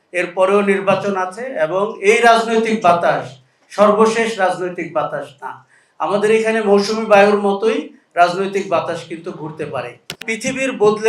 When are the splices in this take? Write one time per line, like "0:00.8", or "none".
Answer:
0:09.4
0:10.2